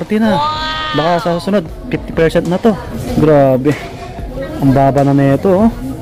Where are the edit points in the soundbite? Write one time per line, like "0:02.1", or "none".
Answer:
0:02.9

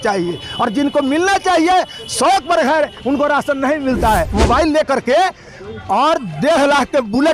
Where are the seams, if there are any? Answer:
0:04.3

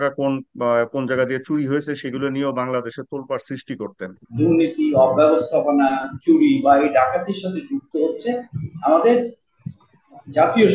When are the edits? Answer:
0:04.2

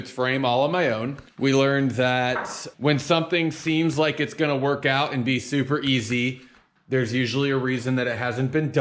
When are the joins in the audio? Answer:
0:01.2
0:02.6

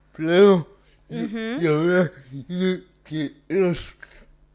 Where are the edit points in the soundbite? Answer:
none

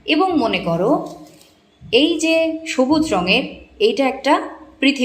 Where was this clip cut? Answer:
none

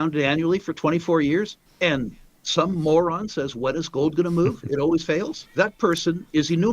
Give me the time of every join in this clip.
0:01.6
0:05.4

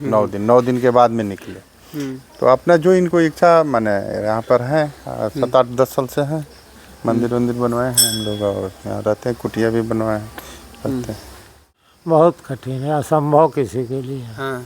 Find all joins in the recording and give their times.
0:11.6

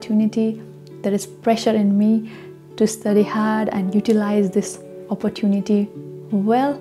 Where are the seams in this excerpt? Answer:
none

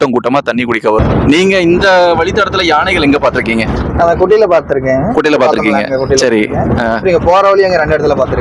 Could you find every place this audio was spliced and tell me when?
0:01.0

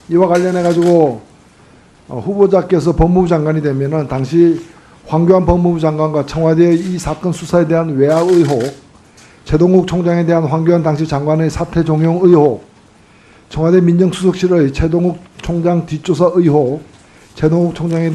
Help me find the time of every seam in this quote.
0:14.0

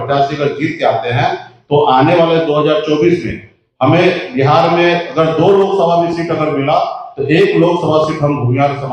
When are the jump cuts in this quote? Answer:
none

